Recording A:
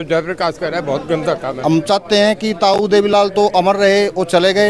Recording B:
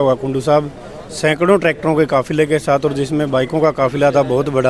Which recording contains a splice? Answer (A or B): A